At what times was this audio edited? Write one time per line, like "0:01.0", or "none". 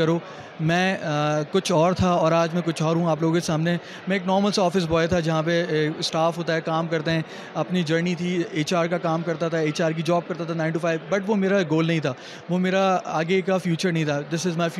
none